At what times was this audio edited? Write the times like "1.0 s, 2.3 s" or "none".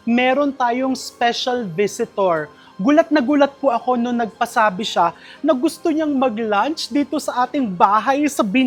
none